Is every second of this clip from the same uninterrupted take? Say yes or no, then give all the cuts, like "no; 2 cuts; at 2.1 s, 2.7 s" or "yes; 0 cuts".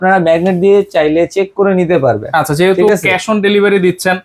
yes; 0 cuts